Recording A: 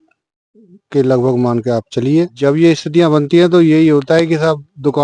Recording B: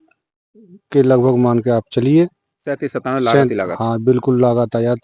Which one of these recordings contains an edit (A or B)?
A